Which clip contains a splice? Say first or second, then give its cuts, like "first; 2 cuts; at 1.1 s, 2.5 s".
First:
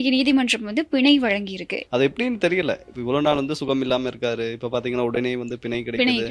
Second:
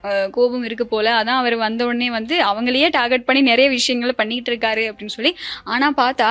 first; 1 cut; at 1.7 s